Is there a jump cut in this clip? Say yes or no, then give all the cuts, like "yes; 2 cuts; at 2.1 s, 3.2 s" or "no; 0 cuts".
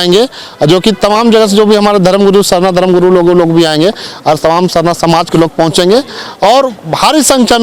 no; 0 cuts